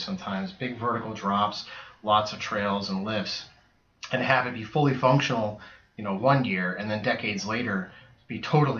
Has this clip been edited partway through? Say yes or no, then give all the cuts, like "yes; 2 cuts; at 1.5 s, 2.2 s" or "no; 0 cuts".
no; 0 cuts